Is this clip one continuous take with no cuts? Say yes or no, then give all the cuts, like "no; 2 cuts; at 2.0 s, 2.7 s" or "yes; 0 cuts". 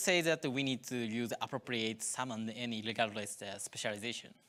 yes; 0 cuts